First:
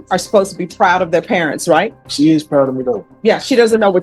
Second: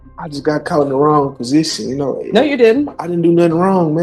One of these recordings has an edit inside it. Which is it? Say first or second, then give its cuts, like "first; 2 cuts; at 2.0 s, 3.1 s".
first; 2 cuts; at 2.0 s, 3.0 s